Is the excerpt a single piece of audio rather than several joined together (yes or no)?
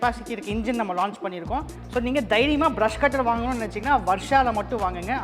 no